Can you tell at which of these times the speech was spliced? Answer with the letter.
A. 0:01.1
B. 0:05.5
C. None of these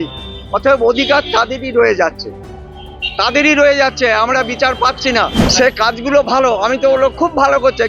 B